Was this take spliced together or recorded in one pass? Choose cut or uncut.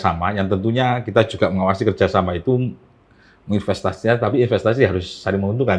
uncut